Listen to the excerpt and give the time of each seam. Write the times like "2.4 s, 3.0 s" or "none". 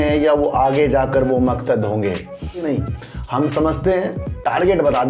2.6 s

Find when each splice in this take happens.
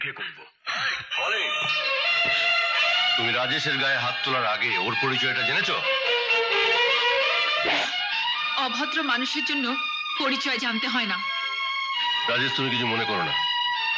none

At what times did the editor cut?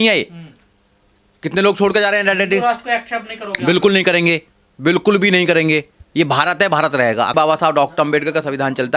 7.3 s

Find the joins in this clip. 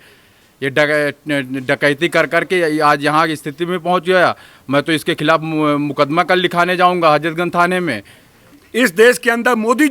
8.6 s

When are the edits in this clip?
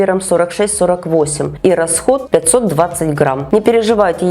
1.5 s, 2.2 s, 3.4 s

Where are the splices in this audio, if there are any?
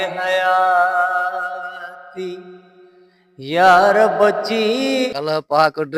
5.1 s

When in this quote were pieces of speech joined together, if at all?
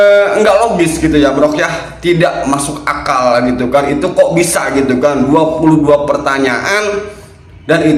none

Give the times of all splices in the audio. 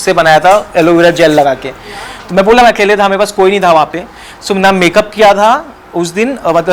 none

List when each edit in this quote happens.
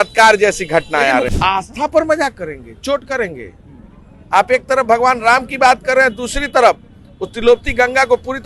1.3 s

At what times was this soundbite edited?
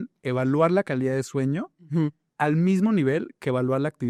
none

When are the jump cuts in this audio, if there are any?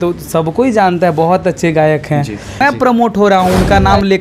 2.6 s

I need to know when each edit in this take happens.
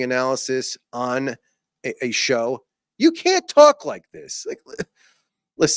none

